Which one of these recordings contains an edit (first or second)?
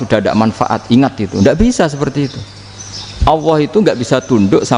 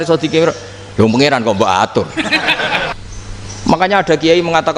second